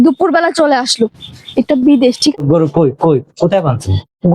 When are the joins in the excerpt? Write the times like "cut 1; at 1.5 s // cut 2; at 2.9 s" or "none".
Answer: cut 1; at 2.3 s